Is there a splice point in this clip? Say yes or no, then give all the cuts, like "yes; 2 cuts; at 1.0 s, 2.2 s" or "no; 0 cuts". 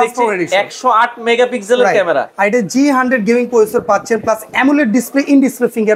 no; 0 cuts